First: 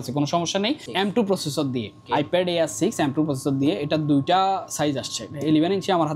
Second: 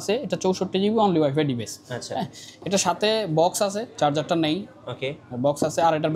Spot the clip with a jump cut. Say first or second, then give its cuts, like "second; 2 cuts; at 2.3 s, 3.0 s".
first; 2 cuts; at 0.8 s, 2.0 s